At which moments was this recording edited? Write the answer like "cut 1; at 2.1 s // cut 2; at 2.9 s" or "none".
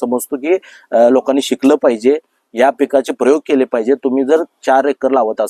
none